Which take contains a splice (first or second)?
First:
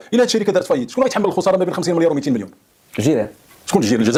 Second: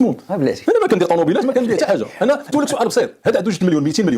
second